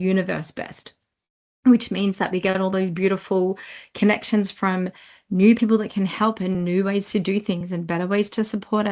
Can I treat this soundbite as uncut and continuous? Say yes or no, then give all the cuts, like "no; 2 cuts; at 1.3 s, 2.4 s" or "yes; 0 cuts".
yes; 0 cuts